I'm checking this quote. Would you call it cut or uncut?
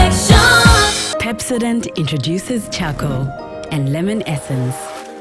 cut